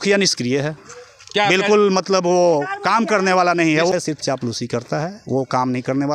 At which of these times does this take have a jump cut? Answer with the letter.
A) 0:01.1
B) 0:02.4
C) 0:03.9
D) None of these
C